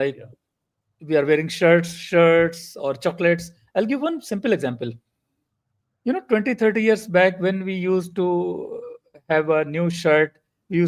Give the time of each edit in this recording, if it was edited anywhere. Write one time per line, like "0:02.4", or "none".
none